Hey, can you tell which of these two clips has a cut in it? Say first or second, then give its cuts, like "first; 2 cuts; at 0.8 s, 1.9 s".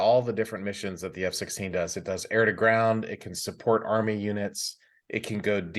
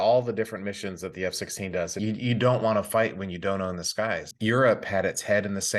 second; 2 cuts; at 1.9 s, 4.3 s